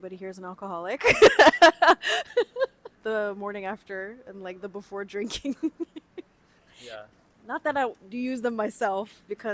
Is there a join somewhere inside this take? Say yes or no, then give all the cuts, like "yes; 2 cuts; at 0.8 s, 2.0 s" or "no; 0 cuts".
no; 0 cuts